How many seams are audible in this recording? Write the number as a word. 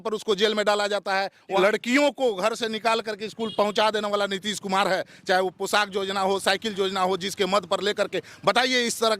one